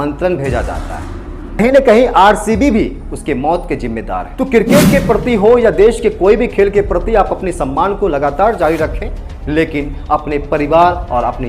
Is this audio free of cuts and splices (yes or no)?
no